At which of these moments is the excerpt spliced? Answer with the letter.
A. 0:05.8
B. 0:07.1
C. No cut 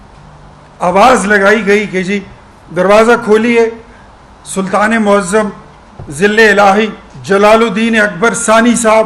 B